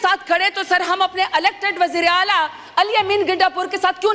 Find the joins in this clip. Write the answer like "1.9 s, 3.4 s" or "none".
none